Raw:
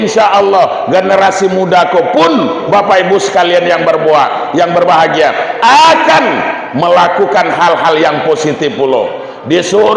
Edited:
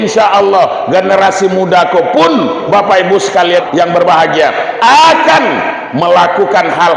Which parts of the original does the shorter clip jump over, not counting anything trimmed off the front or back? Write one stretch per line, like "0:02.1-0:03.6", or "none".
0:03.6-0:04.4